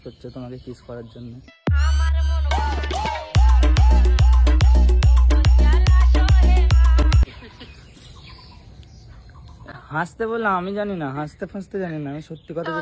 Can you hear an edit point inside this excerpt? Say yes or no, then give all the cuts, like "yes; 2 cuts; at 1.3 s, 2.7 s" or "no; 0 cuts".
no; 0 cuts